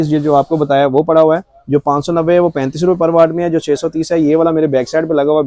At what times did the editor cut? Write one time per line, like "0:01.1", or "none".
none

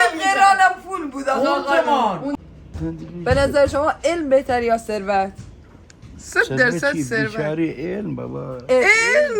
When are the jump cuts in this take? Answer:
0:02.3

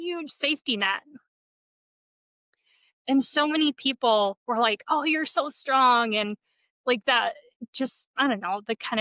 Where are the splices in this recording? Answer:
none

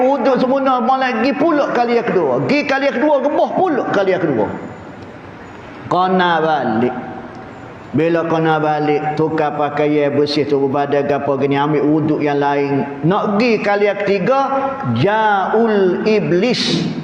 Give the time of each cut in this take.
none

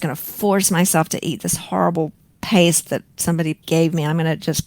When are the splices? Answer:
0:03.6

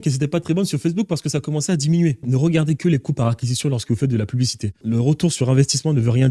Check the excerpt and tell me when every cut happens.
0:02.2

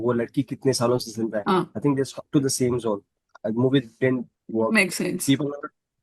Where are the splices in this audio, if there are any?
none

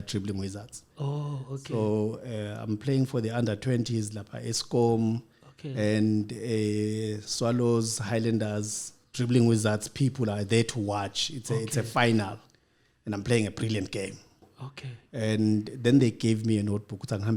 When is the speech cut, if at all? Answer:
0:14.5

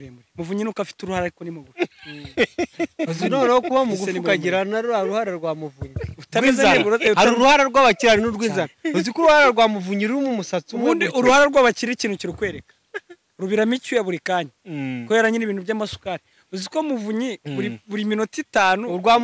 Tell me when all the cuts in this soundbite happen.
none

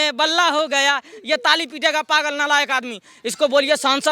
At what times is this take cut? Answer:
none

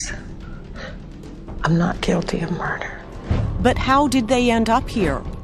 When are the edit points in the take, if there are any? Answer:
0:04.3

